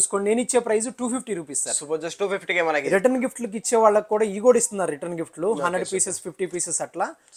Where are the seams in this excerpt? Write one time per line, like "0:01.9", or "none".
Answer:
none